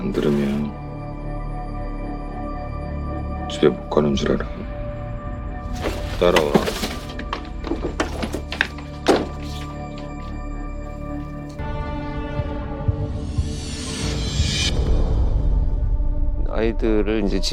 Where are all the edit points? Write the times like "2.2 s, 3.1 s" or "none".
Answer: none